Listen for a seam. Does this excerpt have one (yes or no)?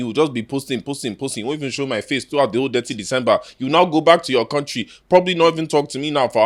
no